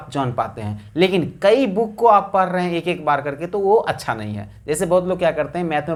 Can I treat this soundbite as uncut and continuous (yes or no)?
yes